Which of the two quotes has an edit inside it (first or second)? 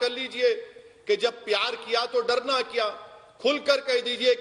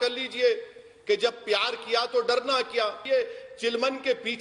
second